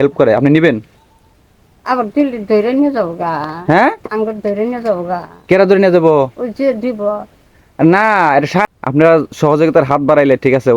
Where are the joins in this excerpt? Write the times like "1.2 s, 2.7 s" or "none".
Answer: 8.7 s